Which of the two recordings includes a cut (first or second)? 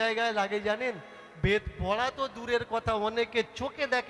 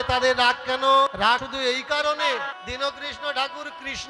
second